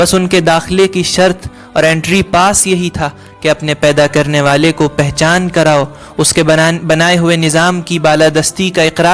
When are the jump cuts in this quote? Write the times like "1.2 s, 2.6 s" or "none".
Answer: none